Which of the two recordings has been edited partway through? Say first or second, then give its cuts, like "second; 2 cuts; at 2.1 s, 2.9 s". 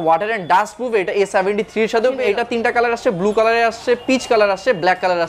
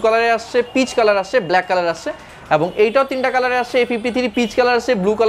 first; 1 cut; at 2.2 s